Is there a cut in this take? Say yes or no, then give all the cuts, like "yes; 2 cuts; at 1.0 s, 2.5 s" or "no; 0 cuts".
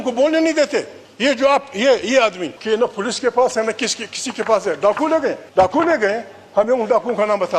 yes; 3 cuts; at 1.0 s, 2.5 s, 5.4 s